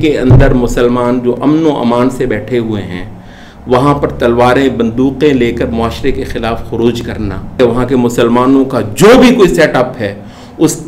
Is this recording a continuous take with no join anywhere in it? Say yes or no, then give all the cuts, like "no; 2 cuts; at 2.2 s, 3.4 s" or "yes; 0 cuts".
no; 1 cut; at 7.6 s